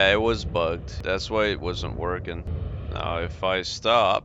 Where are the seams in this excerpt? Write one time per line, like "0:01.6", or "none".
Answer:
0:00.9
0:02.6